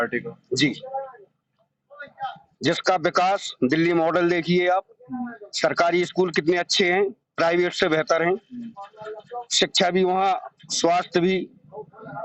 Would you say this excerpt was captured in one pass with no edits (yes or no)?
yes